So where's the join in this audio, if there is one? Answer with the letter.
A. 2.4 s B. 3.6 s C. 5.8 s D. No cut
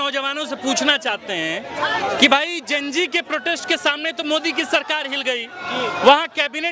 D